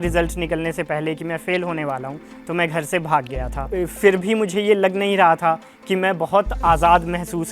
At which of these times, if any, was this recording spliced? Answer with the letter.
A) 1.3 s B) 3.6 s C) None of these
B